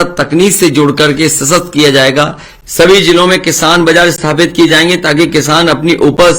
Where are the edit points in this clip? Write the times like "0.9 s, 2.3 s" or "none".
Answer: 2.5 s